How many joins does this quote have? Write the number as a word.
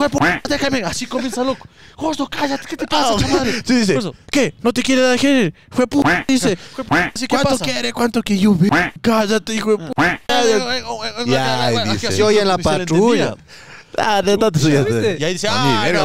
zero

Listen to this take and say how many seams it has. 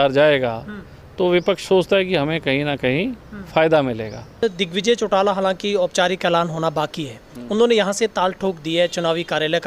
one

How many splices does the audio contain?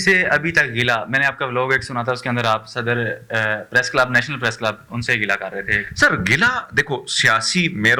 zero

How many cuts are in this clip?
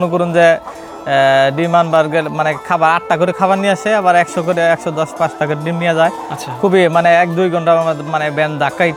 zero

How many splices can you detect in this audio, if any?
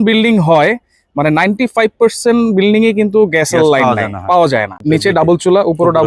one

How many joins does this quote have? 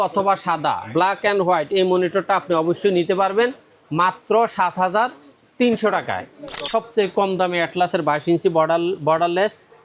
one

